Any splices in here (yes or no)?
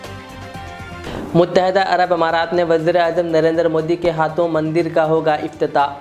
no